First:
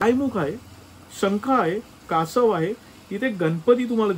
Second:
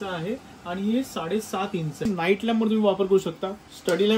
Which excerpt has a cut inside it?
second; 1 cut; at 2.1 s

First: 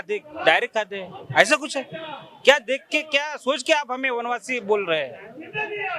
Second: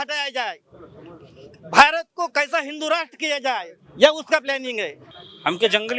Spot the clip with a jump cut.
second; 1 cut; at 5.0 s

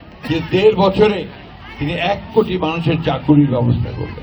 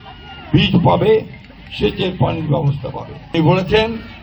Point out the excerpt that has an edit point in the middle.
second; 1 cut; at 3.3 s

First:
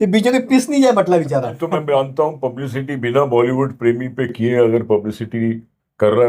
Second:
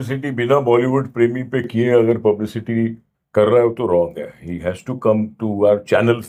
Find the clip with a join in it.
first; 1 cut; at 1.5 s

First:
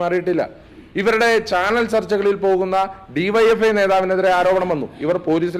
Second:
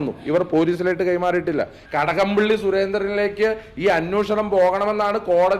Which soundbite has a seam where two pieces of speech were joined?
second; 1 cut; at 1.8 s

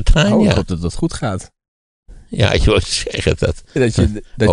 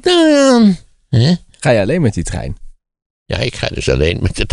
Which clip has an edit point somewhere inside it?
second; 1 cut; at 1.5 s

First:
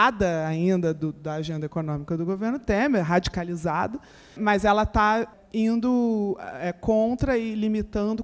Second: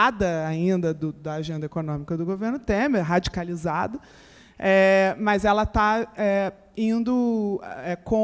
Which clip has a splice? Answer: first; 2 cuts; at 4.4 s, 5.3 s

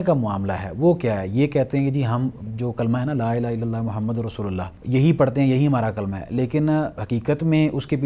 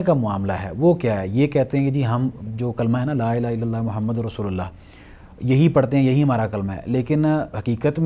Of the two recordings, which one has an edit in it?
first; 1 cut; at 4.7 s

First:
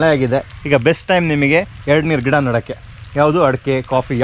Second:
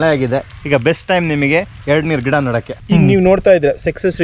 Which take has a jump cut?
second; 1 cut; at 2.8 s

